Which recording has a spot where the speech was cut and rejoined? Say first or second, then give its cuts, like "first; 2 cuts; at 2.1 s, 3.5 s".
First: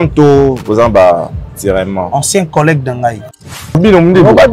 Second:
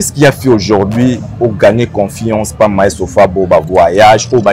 first; 1 cut; at 3.4 s